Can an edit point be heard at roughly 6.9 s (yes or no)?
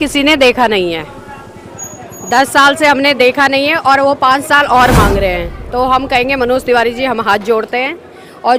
no